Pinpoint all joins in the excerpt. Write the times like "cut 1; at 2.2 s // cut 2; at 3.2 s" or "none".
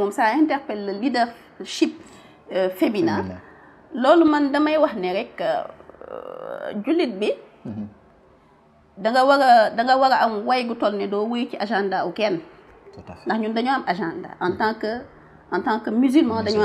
none